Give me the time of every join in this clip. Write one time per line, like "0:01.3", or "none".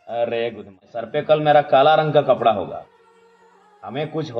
0:01.1

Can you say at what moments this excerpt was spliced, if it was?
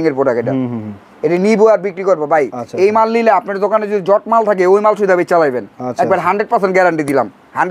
none

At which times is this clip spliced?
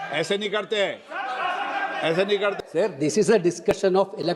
0:02.6

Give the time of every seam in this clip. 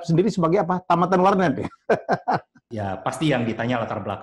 0:02.6

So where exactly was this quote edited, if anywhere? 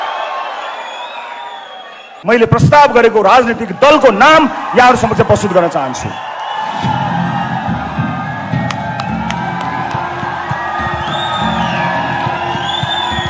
0:02.1

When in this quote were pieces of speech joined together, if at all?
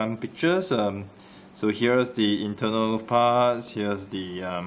0:01.6

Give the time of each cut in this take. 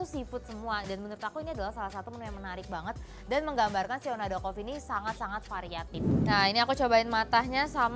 0:06.1

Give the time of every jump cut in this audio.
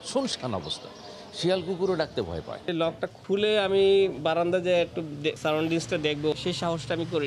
0:02.7
0:05.4
0:06.3

